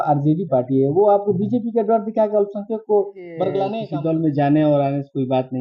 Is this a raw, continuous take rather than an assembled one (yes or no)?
no